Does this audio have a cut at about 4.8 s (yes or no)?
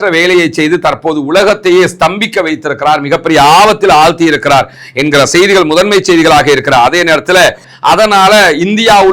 no